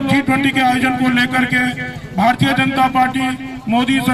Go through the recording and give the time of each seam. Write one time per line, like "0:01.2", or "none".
none